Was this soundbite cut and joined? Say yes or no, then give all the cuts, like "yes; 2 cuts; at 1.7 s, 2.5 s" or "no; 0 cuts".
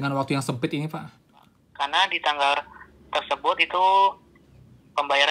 yes; 1 cut; at 1.6 s